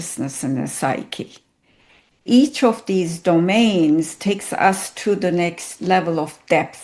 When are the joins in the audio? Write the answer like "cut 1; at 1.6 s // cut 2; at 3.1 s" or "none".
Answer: cut 1; at 2.2 s

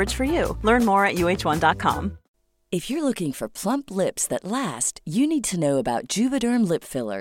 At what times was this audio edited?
cut 1; at 2.2 s

